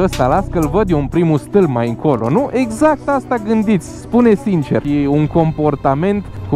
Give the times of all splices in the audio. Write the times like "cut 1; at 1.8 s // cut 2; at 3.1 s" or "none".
cut 1; at 4.8 s